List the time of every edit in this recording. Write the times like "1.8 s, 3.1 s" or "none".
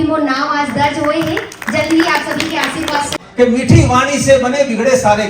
3.2 s